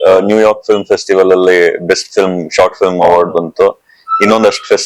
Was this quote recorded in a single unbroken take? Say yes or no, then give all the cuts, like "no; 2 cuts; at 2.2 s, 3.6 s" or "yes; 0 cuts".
yes; 0 cuts